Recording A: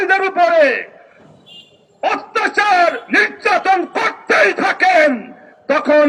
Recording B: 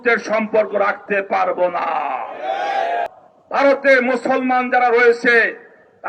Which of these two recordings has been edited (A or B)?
B